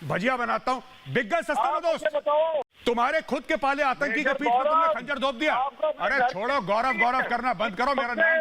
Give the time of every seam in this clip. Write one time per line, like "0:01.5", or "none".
0:02.7